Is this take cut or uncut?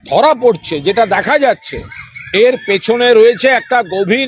uncut